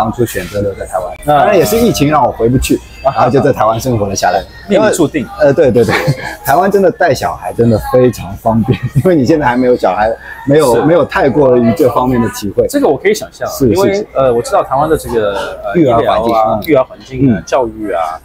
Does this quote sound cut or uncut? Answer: uncut